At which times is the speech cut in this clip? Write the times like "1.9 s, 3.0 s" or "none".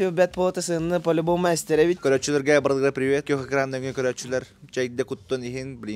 2.0 s, 3.2 s